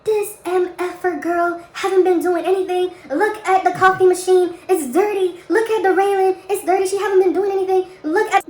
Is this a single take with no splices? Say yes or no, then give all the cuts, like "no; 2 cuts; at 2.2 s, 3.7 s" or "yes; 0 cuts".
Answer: yes; 0 cuts